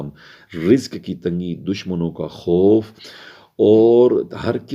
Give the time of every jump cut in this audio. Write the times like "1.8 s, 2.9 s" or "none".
none